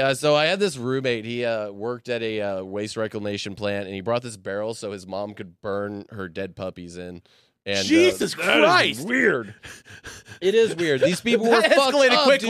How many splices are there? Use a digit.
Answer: 0